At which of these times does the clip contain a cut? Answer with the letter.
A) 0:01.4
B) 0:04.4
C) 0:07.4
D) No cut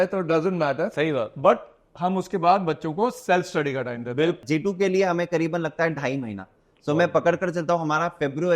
B